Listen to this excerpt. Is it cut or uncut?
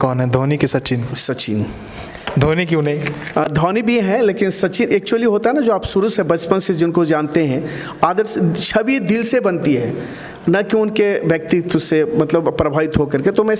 uncut